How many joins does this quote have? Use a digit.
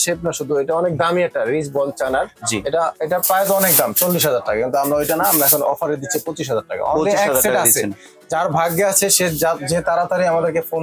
0